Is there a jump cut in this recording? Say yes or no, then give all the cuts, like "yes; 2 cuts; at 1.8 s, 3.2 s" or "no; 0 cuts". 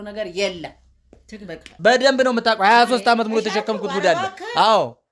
yes; 1 cut; at 1.8 s